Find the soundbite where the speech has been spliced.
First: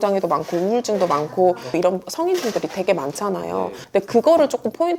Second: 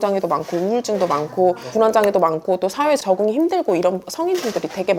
first; 1 cut; at 1.7 s

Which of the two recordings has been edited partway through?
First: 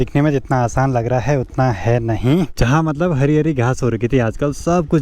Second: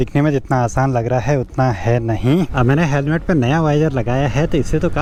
first; 1 cut; at 2.5 s

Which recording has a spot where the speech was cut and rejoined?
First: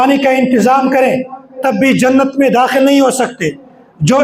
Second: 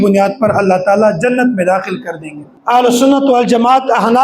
second; 1 cut; at 2.6 s

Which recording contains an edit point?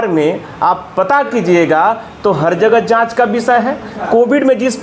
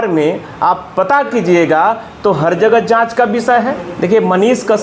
second; 1 cut; at 3.8 s

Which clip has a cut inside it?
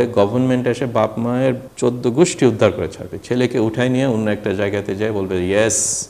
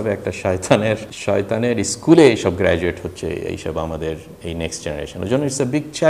first; 1 cut; at 1.7 s

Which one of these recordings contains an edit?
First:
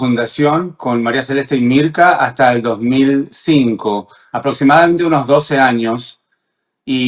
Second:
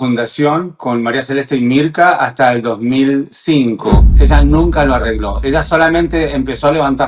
second; 1 cut; at 4.1 s

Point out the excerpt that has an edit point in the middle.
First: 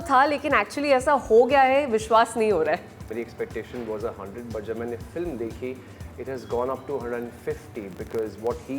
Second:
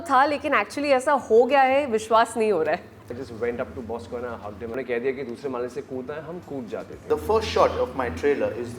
second; 3 cuts; at 3.1 s, 4.7 s, 7.0 s

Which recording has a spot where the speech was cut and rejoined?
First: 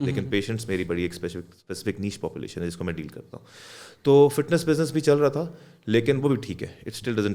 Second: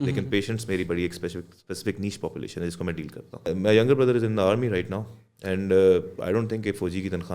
second; 1 cut; at 3.5 s

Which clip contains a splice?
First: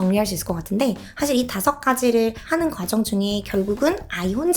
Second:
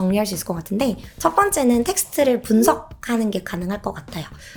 first; 2 cuts; at 1.1 s, 2.4 s

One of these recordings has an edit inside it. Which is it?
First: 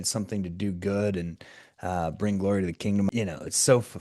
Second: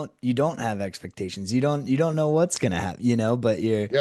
first; 1 cut; at 3.1 s

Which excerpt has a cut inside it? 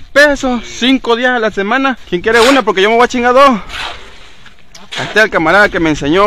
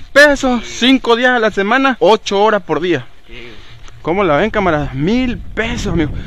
first; 1 cut; at 2.0 s

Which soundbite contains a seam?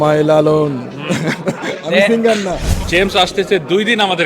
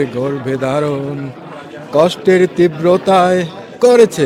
first; 1 cut; at 2.8 s

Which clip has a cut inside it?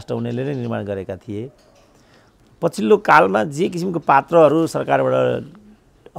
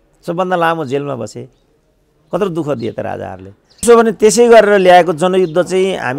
second; 1 cut; at 3.8 s

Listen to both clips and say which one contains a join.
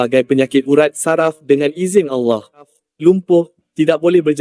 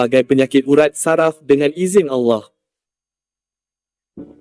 first; 1 cut; at 2.8 s

